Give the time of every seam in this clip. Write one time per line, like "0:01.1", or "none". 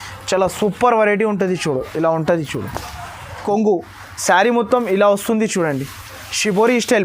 0:03.4